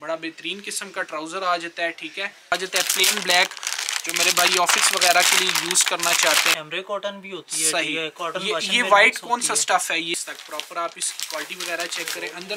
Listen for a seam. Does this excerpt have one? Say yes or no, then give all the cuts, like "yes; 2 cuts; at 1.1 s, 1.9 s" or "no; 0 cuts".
yes; 3 cuts; at 2.5 s, 6.5 s, 10.1 s